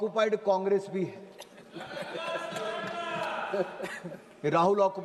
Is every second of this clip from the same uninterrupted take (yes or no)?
yes